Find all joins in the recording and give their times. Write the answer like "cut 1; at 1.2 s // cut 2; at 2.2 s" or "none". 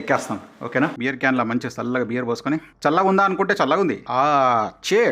cut 1; at 1.0 s // cut 2; at 2.7 s // cut 3; at 4.0 s

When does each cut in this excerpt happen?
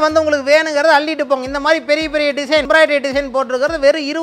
cut 1; at 2.6 s

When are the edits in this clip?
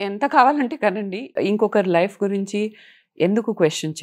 cut 1; at 1.4 s

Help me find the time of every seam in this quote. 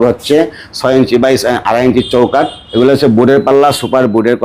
cut 1; at 2.6 s

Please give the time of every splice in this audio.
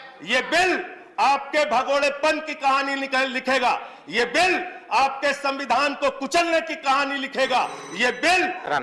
none

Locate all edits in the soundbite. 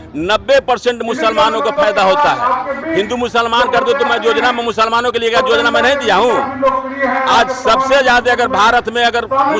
none

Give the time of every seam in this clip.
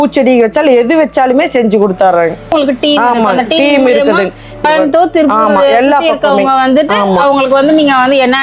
cut 1; at 2.5 s // cut 2; at 4.6 s

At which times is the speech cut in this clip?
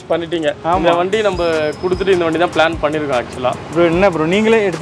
none

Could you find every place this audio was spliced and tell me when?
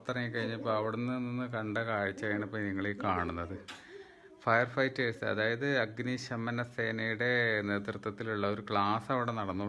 none

